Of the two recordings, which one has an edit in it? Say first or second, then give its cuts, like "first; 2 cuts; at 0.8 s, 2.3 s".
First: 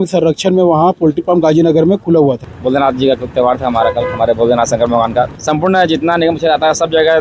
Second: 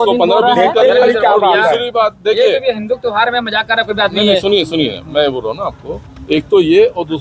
first; 2 cuts; at 2.5 s, 5.3 s